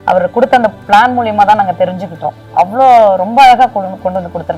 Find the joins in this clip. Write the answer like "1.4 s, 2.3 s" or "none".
none